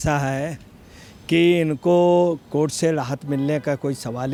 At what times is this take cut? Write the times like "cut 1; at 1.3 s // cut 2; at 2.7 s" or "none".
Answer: none